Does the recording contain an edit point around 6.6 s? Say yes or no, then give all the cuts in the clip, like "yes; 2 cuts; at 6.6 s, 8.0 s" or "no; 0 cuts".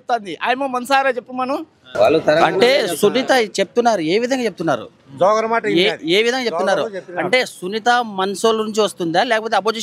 no; 1 cut; at 1.8 s